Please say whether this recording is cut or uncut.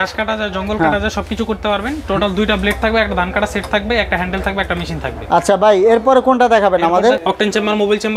uncut